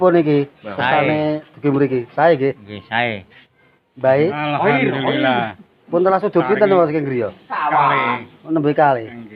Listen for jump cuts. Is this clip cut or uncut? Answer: uncut